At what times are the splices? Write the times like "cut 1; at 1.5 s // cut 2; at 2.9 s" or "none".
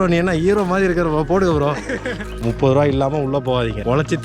cut 1; at 2.4 s